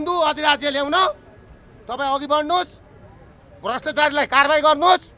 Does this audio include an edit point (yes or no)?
no